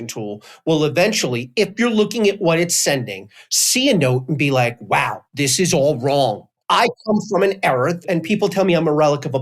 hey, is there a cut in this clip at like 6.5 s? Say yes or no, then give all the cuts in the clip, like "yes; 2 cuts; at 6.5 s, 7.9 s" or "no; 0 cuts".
yes; 1 cut; at 6.5 s